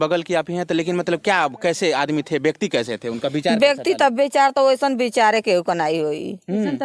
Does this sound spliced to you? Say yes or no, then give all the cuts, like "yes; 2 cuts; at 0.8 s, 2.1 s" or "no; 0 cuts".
no; 0 cuts